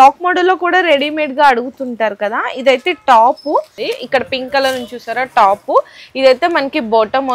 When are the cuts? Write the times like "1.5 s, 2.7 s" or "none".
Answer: 3.8 s